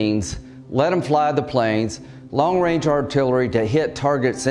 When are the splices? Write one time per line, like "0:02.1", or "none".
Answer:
none